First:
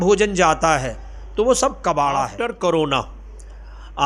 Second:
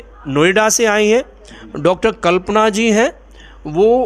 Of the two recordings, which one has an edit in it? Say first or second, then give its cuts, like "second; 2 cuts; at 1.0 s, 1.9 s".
first; 1 cut; at 2.3 s